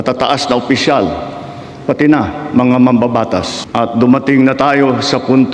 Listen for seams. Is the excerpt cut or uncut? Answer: cut